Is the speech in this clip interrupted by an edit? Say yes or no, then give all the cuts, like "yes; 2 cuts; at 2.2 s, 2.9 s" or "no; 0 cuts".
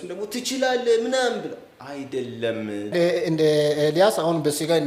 yes; 1 cut; at 2.9 s